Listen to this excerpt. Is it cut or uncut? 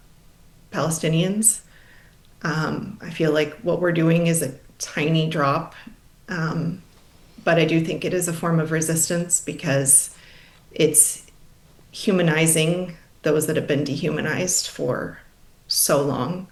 uncut